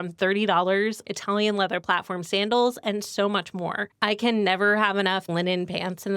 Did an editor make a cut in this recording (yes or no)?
yes